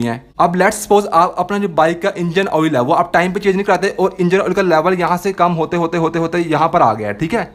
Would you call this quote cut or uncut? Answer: uncut